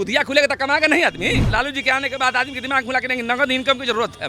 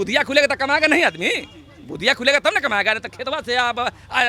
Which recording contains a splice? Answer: first; 1 cut; at 1.5 s

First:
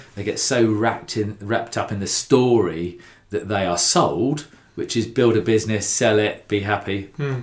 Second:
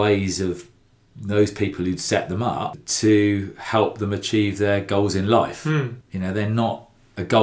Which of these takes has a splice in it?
second; 2 cuts; at 2.8 s, 6.0 s

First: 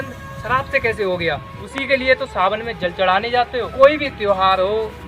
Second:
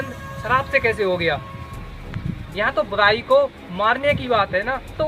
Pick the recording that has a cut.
first; 2 cuts; at 1.6 s, 3.7 s

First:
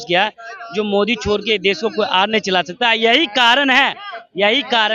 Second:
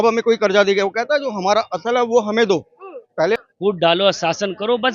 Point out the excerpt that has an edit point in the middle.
second; 1 cut; at 3.4 s

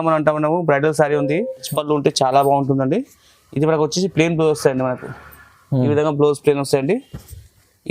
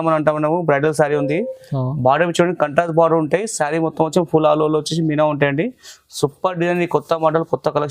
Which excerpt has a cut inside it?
first; 1 cut; at 1.7 s

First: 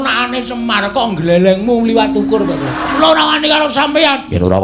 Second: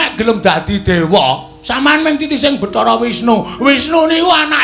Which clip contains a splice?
first; 1 cut; at 3.0 s

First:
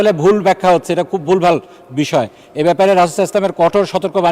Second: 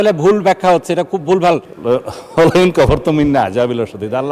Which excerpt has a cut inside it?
second; 1 cut; at 1.7 s

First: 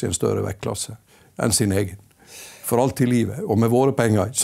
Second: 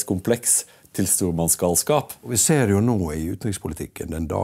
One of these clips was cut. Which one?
second; 1 cut; at 2.3 s

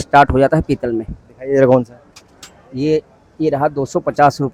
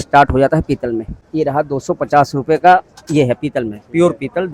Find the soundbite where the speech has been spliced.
second; 1 cut; at 1.2 s

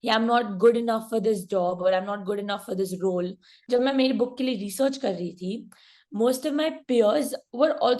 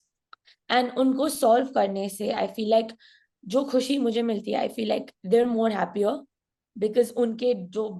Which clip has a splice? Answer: first; 1 cut; at 3.5 s

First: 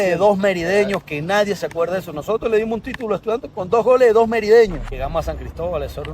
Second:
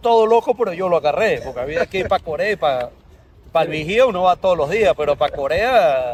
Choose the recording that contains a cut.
first; 1 cut; at 4.9 s

